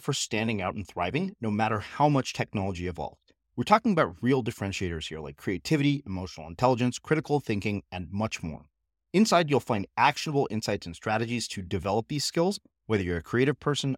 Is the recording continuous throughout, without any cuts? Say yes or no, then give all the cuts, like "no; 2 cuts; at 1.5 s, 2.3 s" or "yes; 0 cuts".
yes; 0 cuts